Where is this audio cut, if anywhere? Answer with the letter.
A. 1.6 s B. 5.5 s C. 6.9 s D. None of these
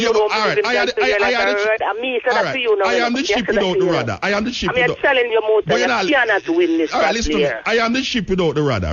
D